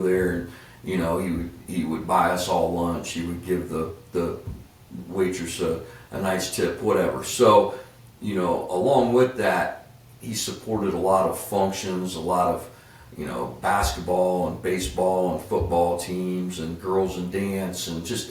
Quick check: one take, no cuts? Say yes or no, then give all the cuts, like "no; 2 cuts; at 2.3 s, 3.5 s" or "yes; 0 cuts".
yes; 0 cuts